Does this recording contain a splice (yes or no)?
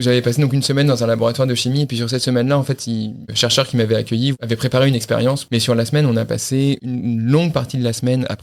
yes